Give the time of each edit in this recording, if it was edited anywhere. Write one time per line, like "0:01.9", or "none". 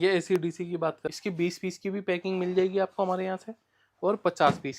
0:01.0